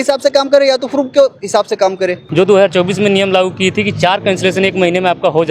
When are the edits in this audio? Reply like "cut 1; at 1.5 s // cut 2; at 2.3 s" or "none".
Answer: cut 1; at 2.2 s